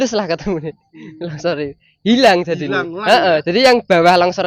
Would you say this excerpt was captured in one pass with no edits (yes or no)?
yes